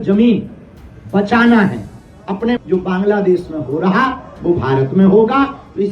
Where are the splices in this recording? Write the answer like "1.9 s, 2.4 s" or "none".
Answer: 2.6 s